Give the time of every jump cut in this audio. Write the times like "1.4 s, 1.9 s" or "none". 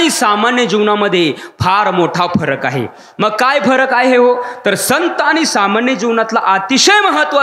none